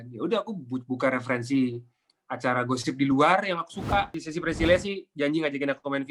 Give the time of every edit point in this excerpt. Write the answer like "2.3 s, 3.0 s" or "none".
4.2 s